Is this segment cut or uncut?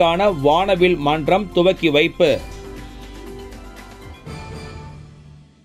uncut